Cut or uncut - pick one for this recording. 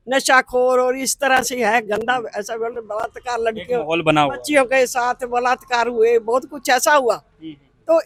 uncut